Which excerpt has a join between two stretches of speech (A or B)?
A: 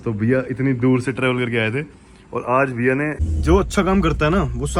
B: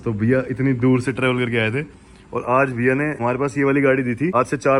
A